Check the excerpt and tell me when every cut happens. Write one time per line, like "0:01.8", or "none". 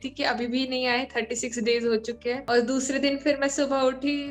0:02.4

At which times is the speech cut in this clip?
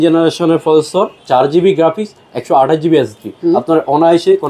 0:01.2
0:03.3

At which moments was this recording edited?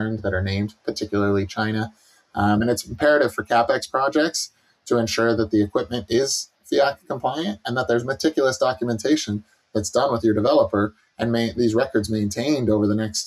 none

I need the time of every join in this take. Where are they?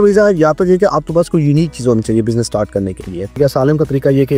0:03.4

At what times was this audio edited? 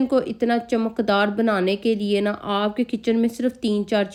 none

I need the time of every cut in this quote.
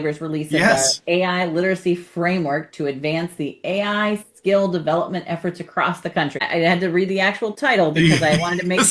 0:06.4

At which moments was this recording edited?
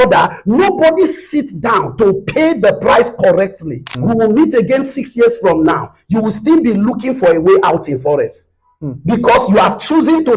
0:03.9

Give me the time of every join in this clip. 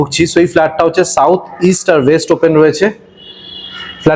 none

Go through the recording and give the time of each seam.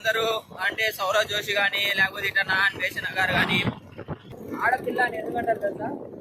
0:04.3

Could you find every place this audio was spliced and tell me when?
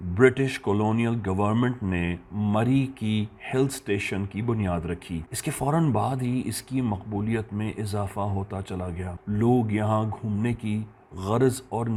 none

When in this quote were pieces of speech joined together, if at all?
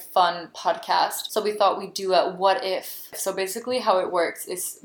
0:01.2
0:03.1

